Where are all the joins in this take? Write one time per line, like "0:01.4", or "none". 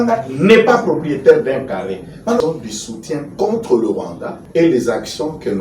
0:02.4